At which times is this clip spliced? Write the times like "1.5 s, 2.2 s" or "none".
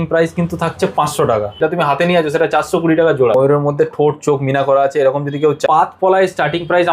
1.6 s, 3.3 s, 5.6 s